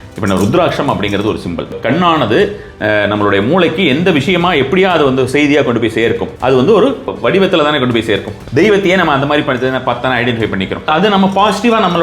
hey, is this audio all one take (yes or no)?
no